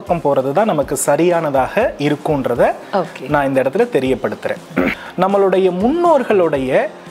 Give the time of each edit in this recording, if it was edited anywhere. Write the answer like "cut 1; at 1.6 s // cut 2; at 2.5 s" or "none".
cut 1; at 5.0 s